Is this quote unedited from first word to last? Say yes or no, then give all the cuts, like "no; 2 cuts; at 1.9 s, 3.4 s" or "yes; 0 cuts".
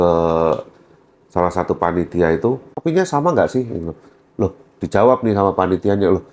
no; 1 cut; at 2.8 s